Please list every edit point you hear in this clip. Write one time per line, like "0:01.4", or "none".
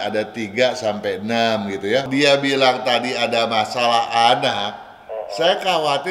0:02.1